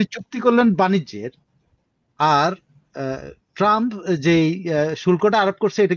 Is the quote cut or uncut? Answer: uncut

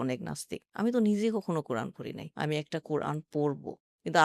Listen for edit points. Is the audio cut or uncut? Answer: cut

